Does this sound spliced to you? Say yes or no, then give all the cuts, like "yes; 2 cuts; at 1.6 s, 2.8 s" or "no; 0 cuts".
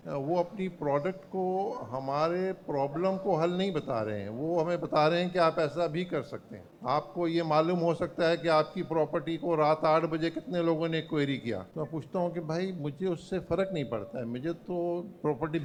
no; 0 cuts